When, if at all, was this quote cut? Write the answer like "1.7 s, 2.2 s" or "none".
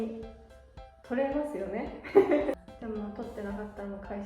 2.6 s